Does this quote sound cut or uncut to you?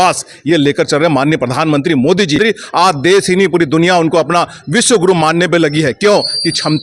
cut